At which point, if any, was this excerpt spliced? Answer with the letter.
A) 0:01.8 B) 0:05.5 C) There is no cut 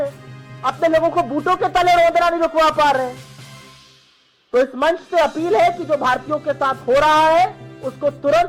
C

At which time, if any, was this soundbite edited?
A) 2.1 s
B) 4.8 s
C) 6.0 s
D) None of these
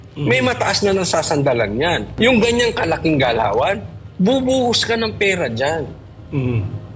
A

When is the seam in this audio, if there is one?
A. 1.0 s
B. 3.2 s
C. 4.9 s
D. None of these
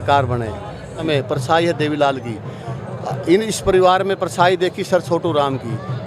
A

